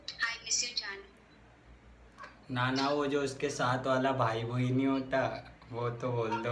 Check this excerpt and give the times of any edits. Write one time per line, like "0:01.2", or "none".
none